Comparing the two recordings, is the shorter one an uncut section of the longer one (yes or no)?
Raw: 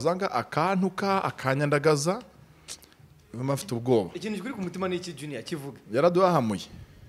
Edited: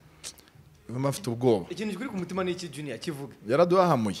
yes